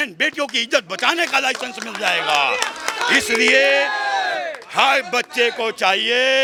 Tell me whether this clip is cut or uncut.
uncut